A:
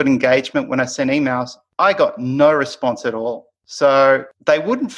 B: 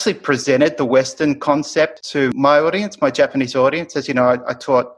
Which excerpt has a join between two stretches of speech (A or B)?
B